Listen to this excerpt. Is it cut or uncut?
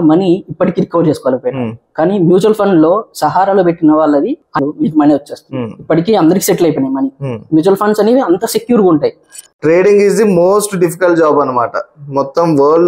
cut